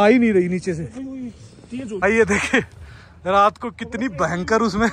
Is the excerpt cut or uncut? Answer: uncut